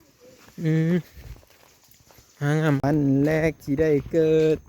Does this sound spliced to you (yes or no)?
yes